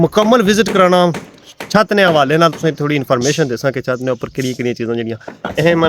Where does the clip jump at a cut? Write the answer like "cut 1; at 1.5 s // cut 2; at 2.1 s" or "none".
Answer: none